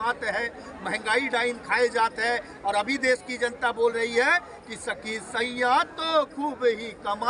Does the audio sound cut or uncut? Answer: uncut